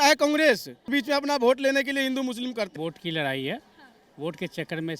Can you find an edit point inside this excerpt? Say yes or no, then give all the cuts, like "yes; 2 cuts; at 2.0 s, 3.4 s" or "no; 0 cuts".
yes; 2 cuts; at 0.9 s, 2.7 s